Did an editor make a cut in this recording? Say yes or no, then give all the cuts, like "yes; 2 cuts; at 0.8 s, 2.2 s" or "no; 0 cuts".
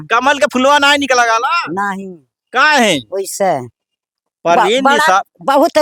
no; 0 cuts